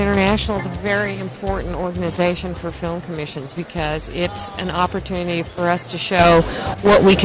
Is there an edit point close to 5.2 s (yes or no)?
yes